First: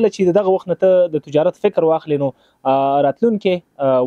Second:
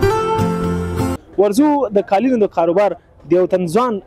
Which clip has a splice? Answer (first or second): second